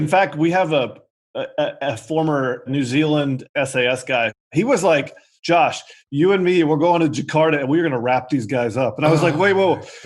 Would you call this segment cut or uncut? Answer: cut